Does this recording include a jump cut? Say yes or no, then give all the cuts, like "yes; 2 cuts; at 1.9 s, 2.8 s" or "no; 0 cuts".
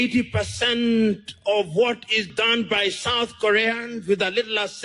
yes; 1 cut; at 2.3 s